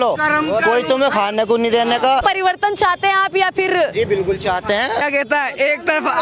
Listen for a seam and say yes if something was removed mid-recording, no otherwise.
yes